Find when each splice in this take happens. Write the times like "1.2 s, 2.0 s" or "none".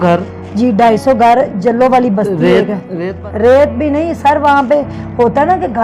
3.0 s